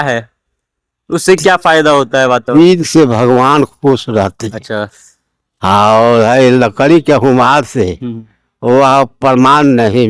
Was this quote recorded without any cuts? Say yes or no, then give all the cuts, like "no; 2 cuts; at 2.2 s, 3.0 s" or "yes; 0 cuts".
yes; 0 cuts